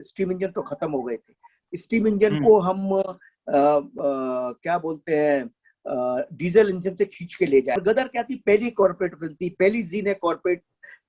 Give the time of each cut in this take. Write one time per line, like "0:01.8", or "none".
0:07.8